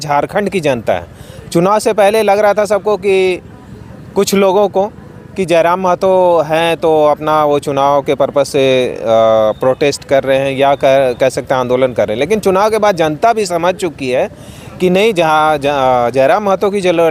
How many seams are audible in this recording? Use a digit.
0